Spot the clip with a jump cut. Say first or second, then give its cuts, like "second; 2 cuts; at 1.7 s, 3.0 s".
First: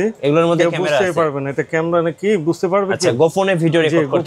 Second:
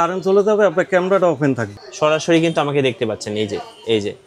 second; 1 cut; at 1.7 s